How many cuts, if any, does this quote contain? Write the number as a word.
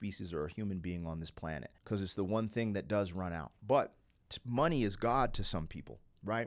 two